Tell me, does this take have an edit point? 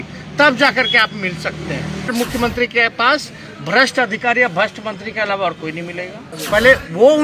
yes; 2 cuts; at 2.1 s, 6.3 s

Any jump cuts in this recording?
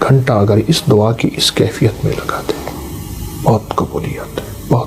no; 0 cuts

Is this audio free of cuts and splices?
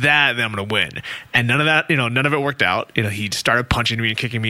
yes; 0 cuts

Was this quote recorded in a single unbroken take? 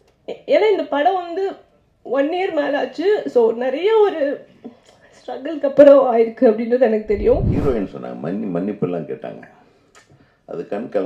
no; 1 cut; at 7.5 s

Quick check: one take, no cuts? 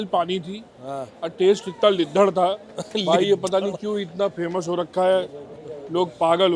yes; 0 cuts

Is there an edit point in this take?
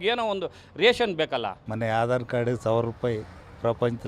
yes; 1 cut; at 1.6 s

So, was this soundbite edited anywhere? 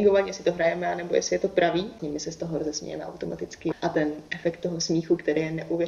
yes; 2 cuts; at 2.0 s, 3.7 s

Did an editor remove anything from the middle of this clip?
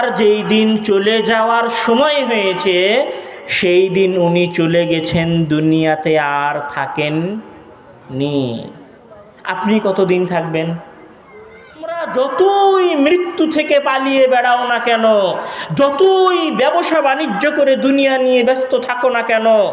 yes; 1 cut; at 12.0 s

